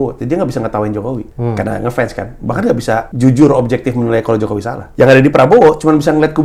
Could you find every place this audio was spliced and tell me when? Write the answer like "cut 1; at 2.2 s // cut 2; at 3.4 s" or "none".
cut 1; at 1.3 s // cut 2; at 3.1 s // cut 3; at 4.8 s